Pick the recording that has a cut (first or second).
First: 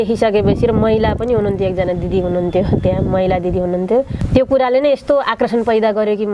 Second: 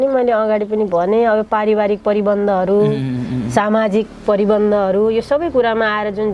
first